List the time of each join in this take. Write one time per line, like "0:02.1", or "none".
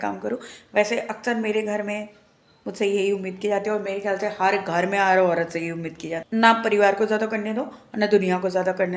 0:06.1